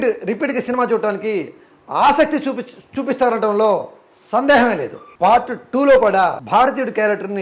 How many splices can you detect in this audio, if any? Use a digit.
2